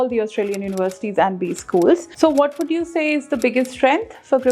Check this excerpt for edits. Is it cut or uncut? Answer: cut